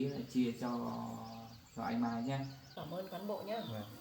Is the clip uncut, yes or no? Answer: no